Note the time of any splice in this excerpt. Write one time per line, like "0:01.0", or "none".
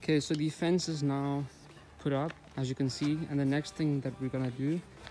0:02.4